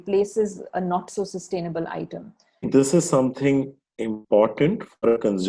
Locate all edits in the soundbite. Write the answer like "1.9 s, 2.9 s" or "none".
2.6 s